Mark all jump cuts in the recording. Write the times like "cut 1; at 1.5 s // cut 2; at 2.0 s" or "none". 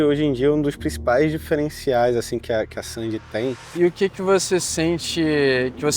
cut 1; at 3.7 s

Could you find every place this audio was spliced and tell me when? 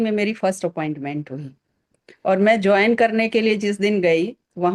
none

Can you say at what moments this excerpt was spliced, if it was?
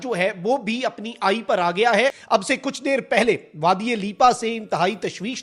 cut 1; at 2.3 s

